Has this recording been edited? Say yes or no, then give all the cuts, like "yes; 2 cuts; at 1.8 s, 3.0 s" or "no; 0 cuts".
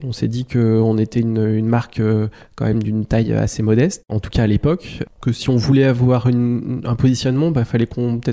no; 0 cuts